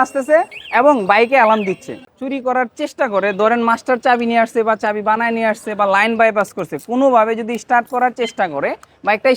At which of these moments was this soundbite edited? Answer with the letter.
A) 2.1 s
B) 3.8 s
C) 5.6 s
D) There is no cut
A